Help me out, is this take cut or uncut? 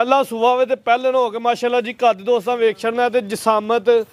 uncut